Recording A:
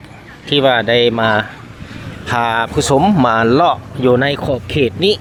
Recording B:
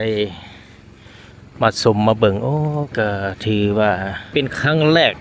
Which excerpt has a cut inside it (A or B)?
B